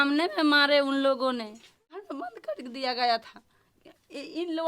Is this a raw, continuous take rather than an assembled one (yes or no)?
no